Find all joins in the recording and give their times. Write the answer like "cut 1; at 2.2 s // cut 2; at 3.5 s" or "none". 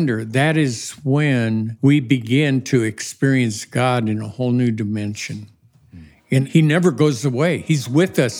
cut 1; at 1.7 s // cut 2; at 6.4 s